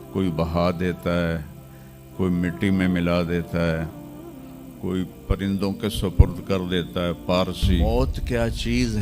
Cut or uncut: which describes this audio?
cut